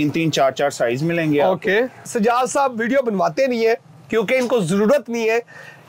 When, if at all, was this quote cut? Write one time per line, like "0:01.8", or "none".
0:02.0